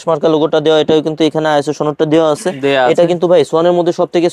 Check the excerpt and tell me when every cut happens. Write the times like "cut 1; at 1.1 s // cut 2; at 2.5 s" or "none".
none